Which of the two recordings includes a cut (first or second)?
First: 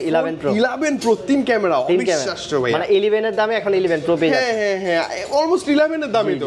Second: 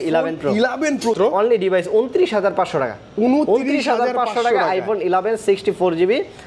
second